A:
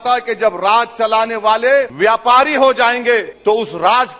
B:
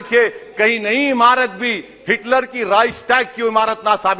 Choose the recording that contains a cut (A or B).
A